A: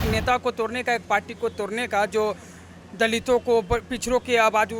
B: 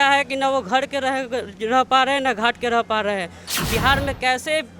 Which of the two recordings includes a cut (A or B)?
B